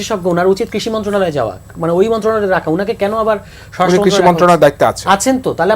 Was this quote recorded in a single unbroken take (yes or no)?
yes